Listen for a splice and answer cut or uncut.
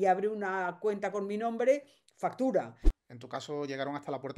cut